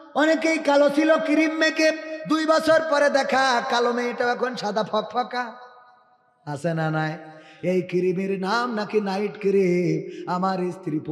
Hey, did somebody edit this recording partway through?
no; 0 cuts

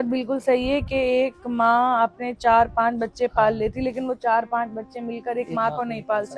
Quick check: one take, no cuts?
yes; 0 cuts

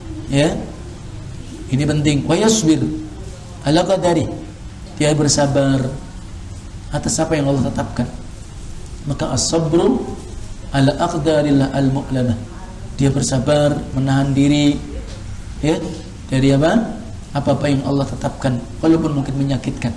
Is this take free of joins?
yes; 0 cuts

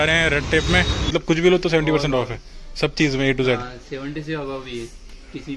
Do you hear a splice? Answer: yes; 1 cut; at 1.1 s

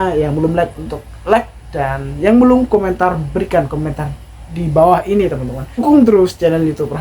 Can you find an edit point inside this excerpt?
yes; 1 cut; at 5.8 s

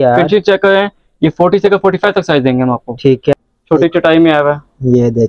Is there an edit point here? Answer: yes; 1 cut; at 3.3 s

